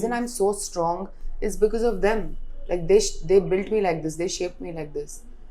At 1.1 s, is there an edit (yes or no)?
no